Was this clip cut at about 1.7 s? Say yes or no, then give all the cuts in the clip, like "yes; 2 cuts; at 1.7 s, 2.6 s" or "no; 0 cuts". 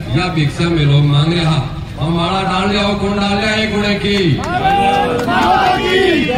no; 0 cuts